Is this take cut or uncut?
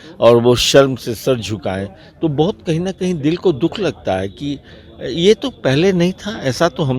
uncut